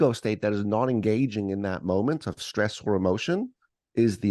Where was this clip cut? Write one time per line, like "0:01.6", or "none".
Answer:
none